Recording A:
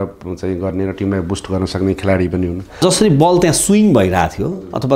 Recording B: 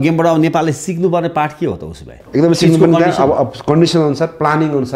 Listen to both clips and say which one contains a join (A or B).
A